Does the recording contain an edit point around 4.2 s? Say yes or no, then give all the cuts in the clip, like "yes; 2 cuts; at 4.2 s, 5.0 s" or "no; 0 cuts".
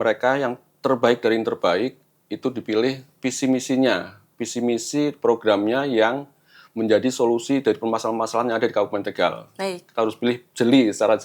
no; 0 cuts